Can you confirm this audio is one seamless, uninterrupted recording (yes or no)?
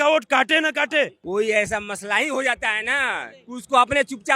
no